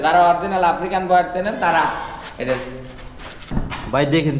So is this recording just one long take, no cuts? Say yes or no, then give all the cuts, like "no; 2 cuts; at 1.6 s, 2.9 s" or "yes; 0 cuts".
no; 1 cut; at 3.4 s